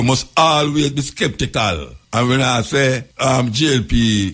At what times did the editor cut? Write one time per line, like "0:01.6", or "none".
0:01.9
0:03.1